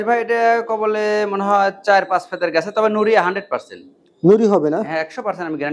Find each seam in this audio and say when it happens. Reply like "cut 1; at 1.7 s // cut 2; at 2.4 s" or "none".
none